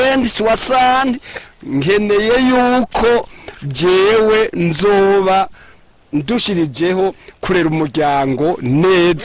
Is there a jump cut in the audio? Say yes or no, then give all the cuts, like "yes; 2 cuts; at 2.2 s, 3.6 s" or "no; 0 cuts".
no; 0 cuts